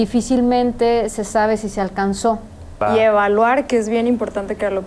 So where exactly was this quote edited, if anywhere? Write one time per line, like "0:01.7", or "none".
0:02.7